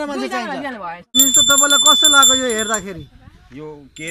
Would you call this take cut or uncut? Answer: cut